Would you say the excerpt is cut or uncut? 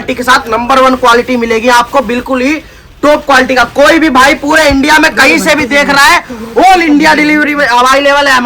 uncut